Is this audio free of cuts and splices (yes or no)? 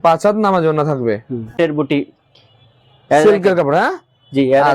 no